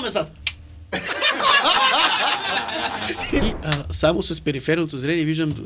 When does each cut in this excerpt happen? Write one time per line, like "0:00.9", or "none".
0:03.4